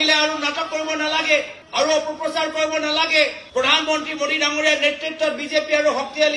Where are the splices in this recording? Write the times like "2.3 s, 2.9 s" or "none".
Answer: none